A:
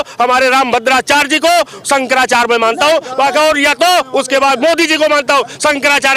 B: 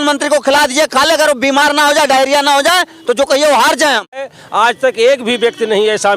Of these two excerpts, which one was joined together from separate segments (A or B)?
B